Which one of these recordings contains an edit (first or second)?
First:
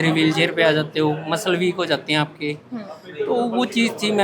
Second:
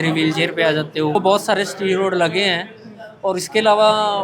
second